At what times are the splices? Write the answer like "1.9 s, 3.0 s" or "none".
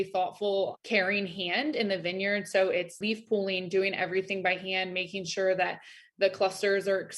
3.0 s